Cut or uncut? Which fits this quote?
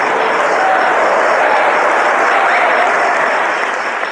uncut